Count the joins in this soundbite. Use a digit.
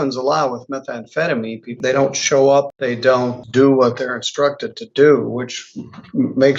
2